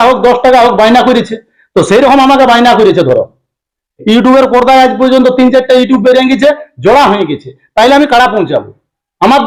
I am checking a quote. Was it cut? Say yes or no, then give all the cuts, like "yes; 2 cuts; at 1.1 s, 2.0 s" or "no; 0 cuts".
no; 0 cuts